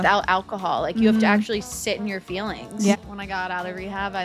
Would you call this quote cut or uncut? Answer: cut